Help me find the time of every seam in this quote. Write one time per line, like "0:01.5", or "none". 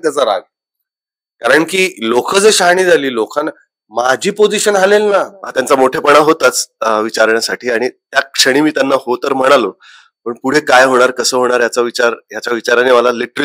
0:05.4

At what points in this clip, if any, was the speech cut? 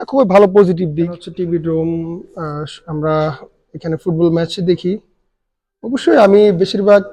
0:01.3

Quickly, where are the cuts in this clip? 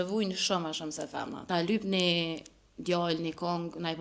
0:01.3

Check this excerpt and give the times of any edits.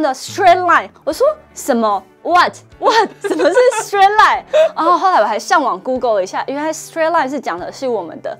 none

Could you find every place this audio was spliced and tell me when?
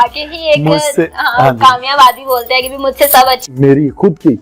0:03.5

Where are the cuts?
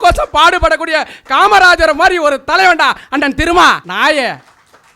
0:03.9

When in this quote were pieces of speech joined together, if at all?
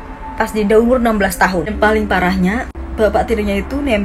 0:01.7

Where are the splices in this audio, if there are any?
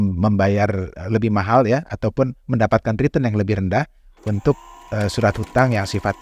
none

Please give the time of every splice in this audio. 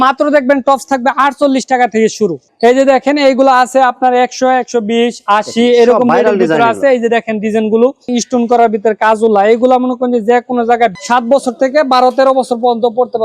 0:02.5
0:08.1
0:10.9

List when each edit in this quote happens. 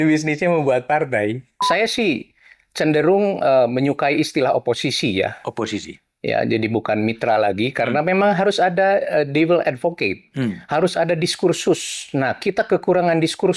0:01.7

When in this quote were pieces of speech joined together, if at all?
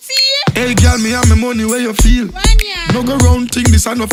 none

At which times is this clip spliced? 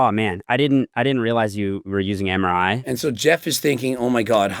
0:02.8

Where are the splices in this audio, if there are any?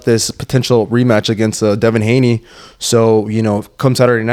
none

